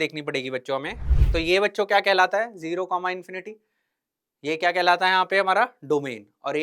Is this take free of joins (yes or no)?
no